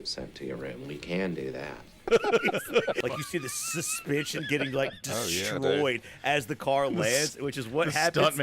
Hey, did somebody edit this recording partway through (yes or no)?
yes